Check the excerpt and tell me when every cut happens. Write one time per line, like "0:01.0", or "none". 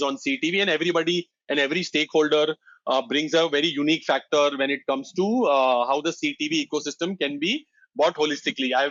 none